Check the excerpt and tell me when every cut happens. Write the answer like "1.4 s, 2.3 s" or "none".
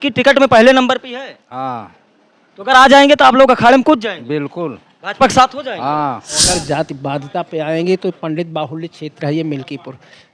6.5 s